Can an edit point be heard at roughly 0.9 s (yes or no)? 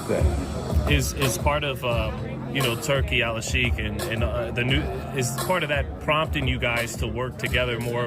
yes